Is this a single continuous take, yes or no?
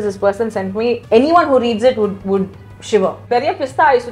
no